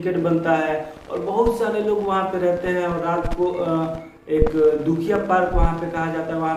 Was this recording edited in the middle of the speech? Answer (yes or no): no